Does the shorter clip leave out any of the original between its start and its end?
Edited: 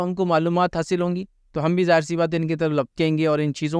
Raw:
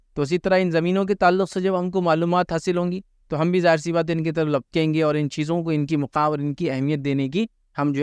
no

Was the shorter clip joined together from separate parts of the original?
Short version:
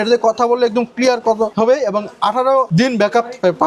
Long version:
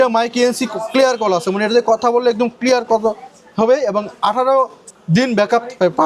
yes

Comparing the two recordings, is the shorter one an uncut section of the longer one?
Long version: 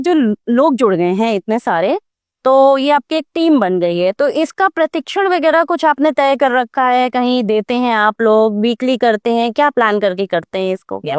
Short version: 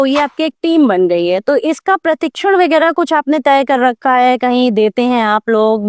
yes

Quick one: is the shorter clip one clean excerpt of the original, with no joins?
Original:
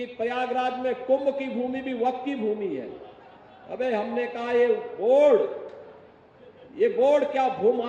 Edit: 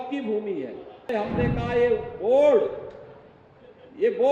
no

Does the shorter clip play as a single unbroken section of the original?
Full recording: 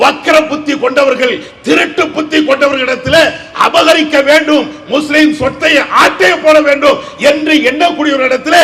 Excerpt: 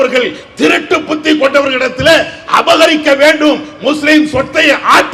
yes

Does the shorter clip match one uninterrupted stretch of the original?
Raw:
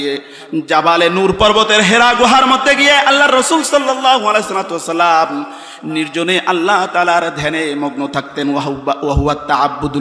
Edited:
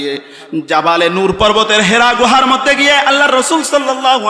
yes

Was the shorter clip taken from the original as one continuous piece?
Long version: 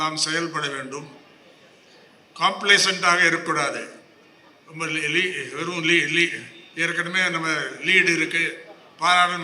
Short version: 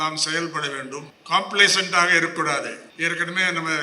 no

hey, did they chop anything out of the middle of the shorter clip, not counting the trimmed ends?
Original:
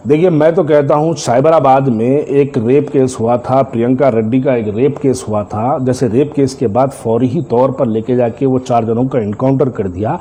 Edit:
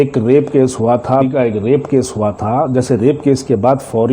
yes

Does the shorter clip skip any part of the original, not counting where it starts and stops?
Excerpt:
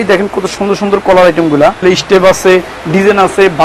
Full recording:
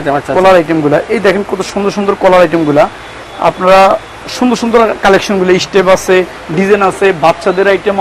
yes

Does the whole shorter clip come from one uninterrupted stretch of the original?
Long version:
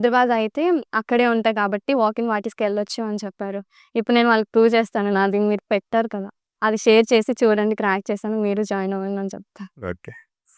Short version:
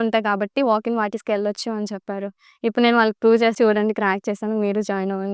no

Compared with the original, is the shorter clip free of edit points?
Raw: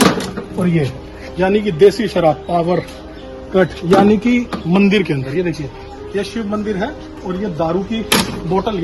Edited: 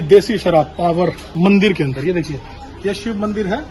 no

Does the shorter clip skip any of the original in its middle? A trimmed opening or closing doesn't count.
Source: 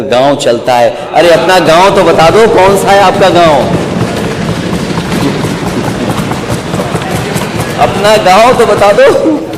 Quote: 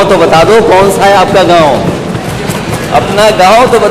yes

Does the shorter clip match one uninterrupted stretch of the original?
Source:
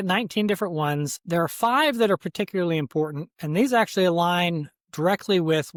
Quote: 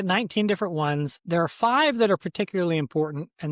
yes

